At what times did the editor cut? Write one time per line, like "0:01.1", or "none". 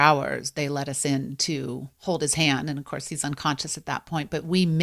0:01.9